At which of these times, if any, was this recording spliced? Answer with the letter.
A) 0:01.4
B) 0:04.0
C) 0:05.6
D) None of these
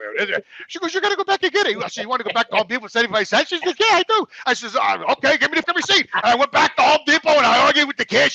C